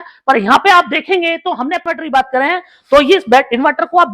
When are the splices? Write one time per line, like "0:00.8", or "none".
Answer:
0:01.8